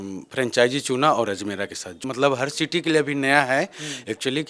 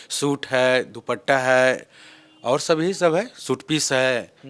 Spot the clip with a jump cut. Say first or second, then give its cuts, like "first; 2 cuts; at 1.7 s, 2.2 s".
first; 1 cut; at 2.1 s